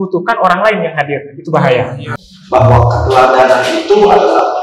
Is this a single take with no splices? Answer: no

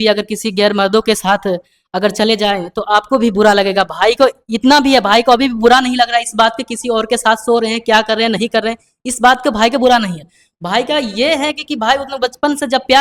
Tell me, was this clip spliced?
no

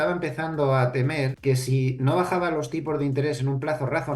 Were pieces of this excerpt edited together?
yes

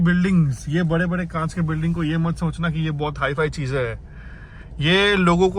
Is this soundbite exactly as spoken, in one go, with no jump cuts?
yes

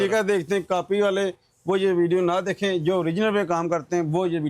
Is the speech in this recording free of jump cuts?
yes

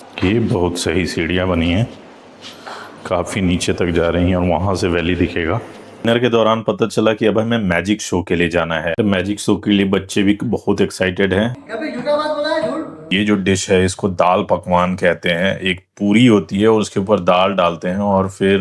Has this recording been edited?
yes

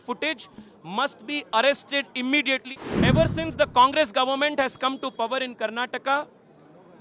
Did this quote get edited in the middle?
yes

